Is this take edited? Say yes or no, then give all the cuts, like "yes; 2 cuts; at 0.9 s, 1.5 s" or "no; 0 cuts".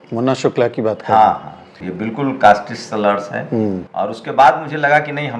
yes; 2 cuts; at 1.8 s, 3.9 s